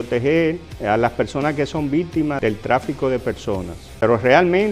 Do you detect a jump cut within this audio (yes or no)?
yes